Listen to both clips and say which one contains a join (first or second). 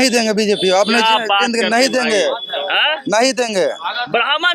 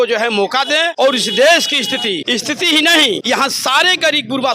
second